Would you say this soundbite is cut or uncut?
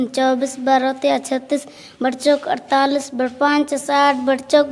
uncut